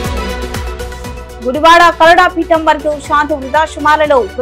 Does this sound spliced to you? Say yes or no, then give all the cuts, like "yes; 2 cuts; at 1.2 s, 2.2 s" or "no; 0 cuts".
yes; 1 cut; at 1.2 s